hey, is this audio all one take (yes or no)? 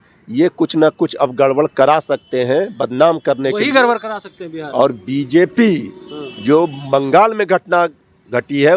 yes